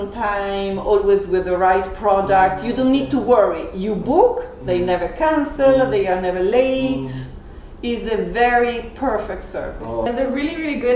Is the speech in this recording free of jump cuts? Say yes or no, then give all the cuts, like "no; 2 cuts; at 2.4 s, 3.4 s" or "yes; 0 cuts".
no; 1 cut; at 10.1 s